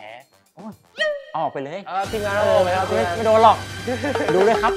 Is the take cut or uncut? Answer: uncut